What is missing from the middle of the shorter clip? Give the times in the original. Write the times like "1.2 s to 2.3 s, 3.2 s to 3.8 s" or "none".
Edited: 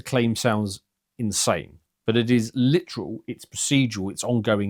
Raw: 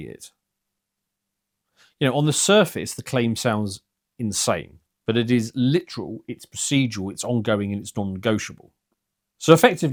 none